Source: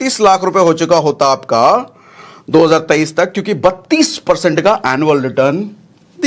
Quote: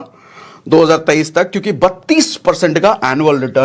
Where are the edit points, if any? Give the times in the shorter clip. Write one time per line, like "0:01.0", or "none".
none

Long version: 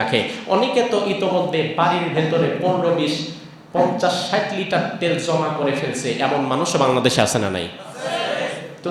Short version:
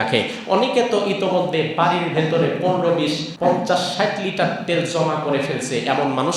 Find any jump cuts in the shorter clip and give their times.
0:03.3

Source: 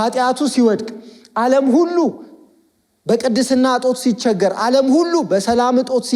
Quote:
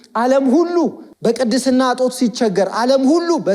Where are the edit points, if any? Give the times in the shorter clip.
0:01.1

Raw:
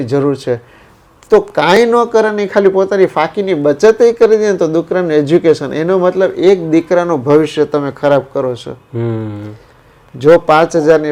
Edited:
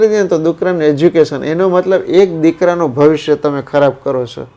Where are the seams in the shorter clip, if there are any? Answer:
none

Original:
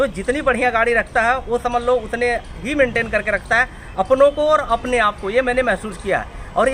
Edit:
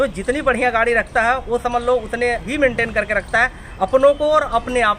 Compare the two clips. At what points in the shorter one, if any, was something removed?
0:02.4

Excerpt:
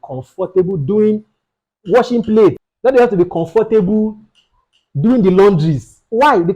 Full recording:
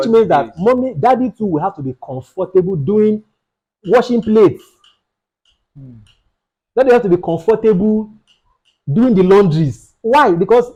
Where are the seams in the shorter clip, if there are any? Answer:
0:02.7

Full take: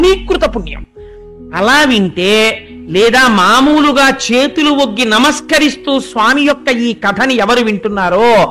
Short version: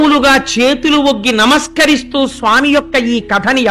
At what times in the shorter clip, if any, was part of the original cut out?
none

